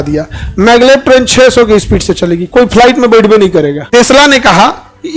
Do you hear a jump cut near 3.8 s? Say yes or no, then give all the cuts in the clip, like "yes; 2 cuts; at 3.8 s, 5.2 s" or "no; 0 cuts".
yes; 1 cut; at 3.8 s